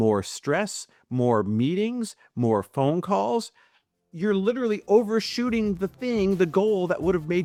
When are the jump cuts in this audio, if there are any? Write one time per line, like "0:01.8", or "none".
none